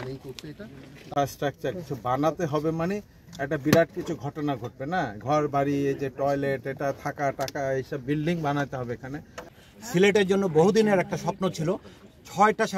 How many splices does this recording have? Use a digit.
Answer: 2